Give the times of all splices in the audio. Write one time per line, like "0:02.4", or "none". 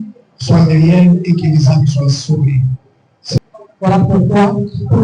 0:03.4